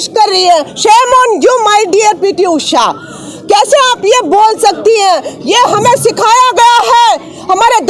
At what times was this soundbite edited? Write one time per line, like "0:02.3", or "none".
none